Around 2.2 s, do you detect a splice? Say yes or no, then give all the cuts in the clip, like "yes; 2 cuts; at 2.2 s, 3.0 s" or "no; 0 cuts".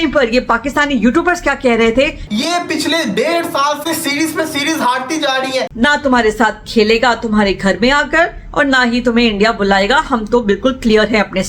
yes; 2 cuts; at 2.2 s, 5.7 s